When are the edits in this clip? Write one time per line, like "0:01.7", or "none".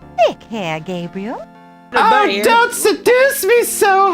0:01.9

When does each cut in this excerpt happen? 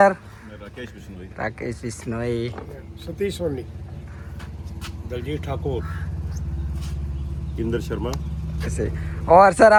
none

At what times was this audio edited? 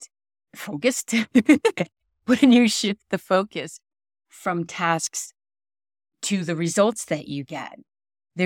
none

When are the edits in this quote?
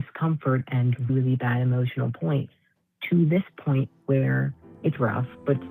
0:04.6

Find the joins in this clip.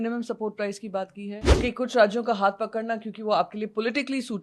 0:01.5

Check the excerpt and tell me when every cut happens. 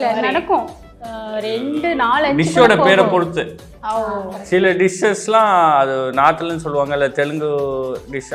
none

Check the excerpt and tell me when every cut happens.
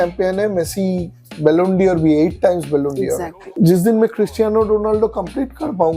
0:03.4

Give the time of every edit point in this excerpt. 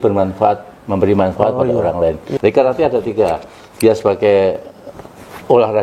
0:02.3

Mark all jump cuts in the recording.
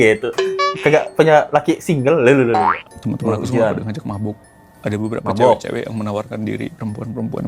0:02.9

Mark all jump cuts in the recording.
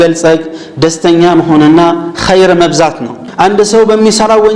0:03.2

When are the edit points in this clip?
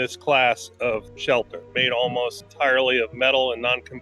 0:02.4

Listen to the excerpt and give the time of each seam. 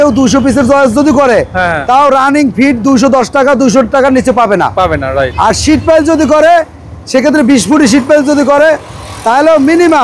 none

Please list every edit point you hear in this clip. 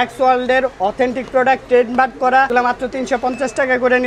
0:02.5

